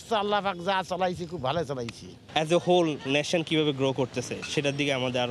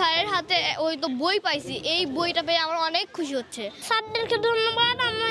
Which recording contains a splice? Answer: second; 1 cut; at 3.8 s

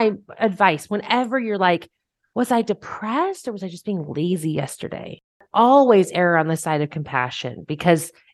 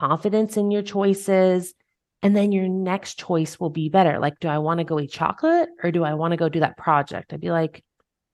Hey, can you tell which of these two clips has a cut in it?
first; 1 cut; at 5.4 s

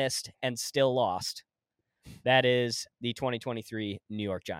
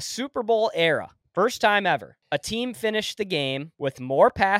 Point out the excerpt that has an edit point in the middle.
second; 3 cuts; at 1.2 s, 2.1 s, 3.7 s

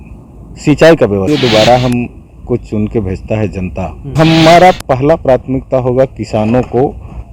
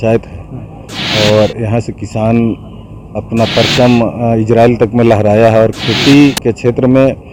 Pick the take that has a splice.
first; 2 cuts; at 1.3 s, 4.2 s

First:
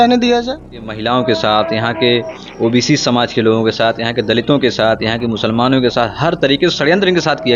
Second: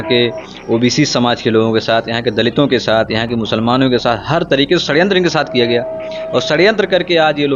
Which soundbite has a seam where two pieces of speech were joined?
first; 1 cut; at 0.9 s

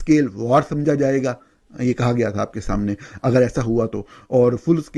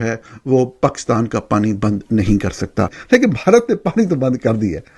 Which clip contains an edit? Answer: second; 1 cut; at 3.0 s

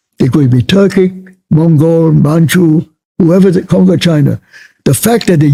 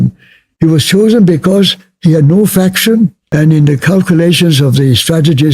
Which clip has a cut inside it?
second; 1 cut; at 3.2 s

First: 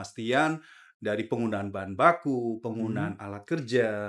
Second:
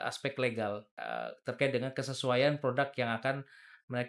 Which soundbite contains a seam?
second; 1 cut; at 0.9 s

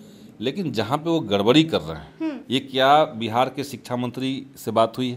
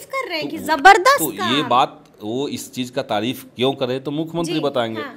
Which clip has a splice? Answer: first; 1 cut; at 2.4 s

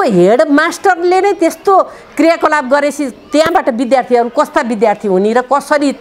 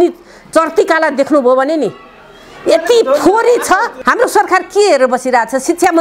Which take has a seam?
second; 1 cut; at 4.0 s

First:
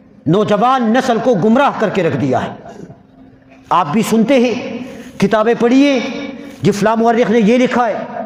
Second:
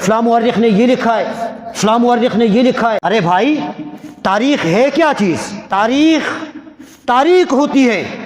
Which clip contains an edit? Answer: second; 2 cuts; at 3.0 s, 5.6 s

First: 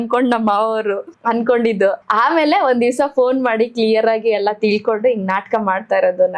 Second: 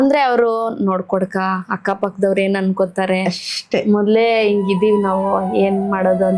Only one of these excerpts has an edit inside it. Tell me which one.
first; 2 cuts; at 1.1 s, 2.0 s

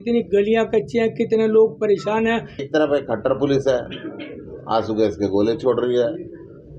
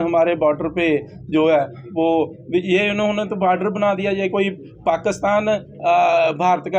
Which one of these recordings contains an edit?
first; 1 cut; at 2.7 s

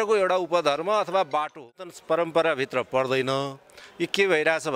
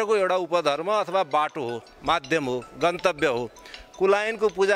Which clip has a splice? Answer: first; 1 cut; at 1.9 s

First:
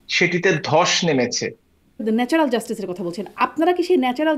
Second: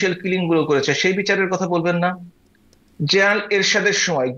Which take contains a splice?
first; 1 cut; at 2.0 s

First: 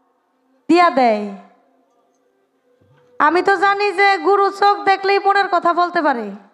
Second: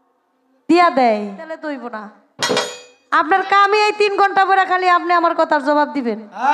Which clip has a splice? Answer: second; 1 cut; at 1.6 s

